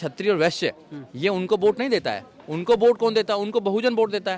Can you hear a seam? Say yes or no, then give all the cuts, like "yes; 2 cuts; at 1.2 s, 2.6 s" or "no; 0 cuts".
no; 0 cuts